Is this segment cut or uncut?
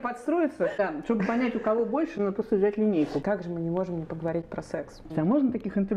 cut